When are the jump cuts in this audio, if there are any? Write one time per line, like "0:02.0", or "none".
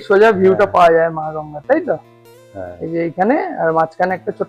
none